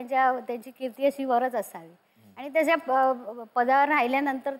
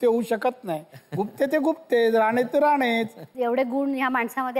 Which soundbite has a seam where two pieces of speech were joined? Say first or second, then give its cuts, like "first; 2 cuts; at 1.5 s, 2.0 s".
second; 1 cut; at 3.2 s